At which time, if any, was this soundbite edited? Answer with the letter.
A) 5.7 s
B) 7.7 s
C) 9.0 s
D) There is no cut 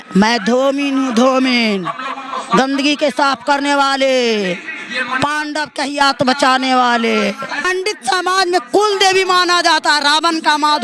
B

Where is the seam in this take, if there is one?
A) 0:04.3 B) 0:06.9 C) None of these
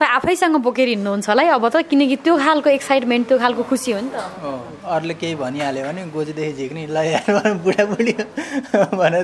C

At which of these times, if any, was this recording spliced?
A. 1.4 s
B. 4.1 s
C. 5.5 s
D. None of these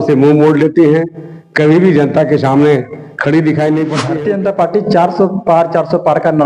B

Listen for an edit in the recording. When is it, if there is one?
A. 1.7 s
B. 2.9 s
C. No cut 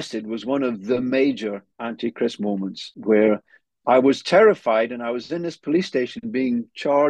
B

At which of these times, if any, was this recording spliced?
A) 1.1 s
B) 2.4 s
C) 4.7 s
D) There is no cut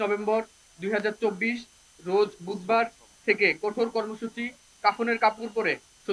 C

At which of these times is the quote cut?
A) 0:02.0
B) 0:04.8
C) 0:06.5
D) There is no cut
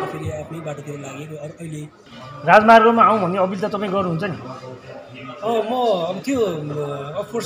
A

